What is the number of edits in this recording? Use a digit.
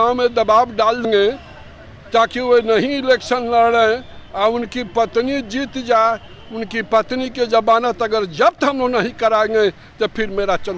1